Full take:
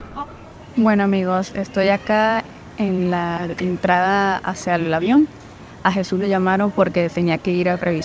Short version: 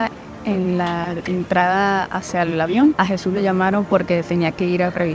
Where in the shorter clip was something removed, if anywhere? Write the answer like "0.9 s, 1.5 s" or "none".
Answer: 3.0 s